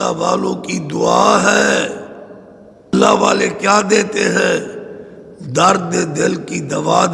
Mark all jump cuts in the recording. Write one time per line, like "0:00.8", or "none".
0:02.9